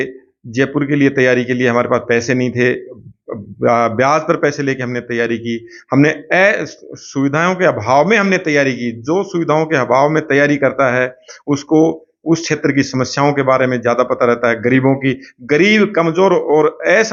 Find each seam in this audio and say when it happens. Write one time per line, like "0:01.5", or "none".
none